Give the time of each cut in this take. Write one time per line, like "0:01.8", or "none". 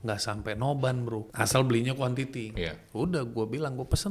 0:01.3